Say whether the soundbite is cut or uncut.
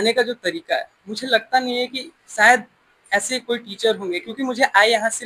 uncut